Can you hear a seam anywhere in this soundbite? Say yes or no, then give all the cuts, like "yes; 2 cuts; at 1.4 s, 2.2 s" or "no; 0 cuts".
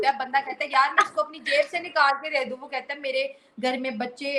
no; 0 cuts